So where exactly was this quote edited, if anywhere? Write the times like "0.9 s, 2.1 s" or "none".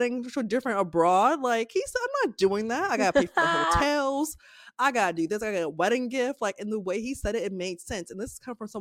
none